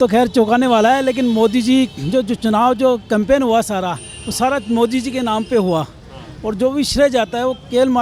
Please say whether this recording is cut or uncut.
uncut